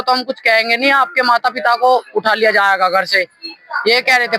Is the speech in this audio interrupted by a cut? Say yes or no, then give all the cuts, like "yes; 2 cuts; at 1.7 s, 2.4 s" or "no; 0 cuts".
no; 0 cuts